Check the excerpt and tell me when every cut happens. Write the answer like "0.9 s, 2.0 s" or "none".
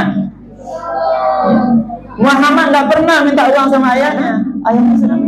4.3 s